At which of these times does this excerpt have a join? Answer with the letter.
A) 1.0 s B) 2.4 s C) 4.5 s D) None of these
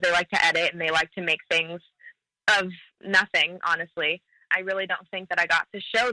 C